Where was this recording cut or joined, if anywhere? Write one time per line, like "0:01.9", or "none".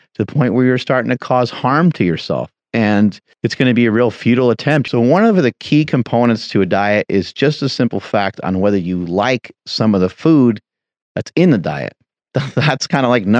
0:03.3
0:04.8